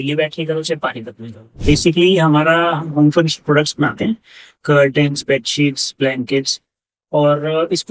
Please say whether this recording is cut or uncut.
cut